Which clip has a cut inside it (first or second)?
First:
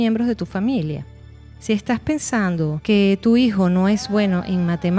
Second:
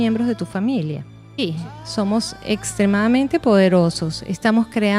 second